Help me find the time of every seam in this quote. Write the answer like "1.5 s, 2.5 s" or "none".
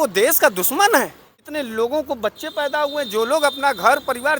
1.4 s